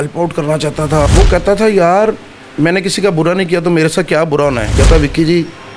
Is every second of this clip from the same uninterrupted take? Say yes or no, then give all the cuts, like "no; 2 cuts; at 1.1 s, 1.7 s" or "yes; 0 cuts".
no; 2 cuts; at 1.1 s, 4.7 s